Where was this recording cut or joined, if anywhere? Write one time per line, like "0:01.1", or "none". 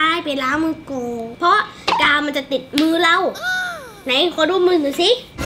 0:01.3

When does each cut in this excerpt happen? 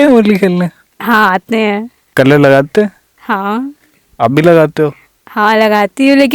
0:02.0

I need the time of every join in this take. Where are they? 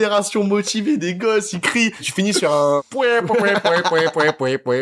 0:02.1
0:02.9

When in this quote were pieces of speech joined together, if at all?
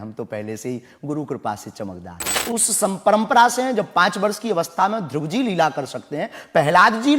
0:02.4

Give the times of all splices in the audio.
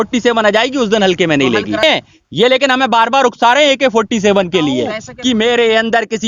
0:01.8
0:05.1

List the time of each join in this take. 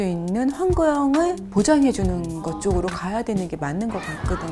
none

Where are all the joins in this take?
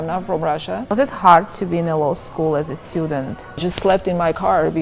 0:00.9
0:03.7

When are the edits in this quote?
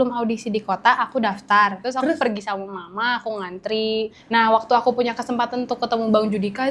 0:01.8
0:04.2

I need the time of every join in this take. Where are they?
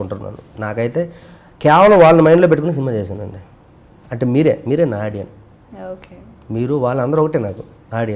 none

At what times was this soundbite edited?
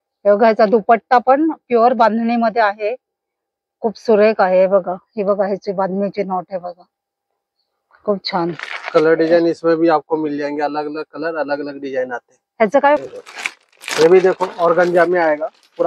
0:13.1

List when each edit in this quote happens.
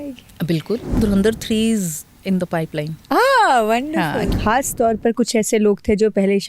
0:00.9
0:02.1
0:04.3

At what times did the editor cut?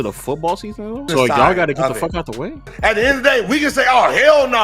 0:01.1
0:02.7

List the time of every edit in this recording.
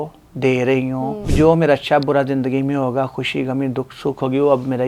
0:01.3

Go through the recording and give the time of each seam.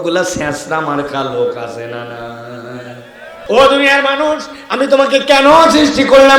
0:03.3

